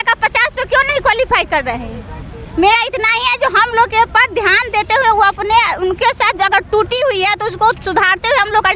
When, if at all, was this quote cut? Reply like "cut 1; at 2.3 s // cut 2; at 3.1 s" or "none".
none